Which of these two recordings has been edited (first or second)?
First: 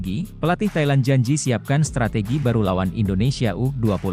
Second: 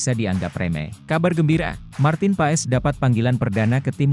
second